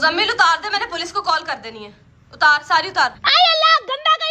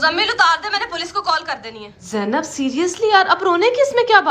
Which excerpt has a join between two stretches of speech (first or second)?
second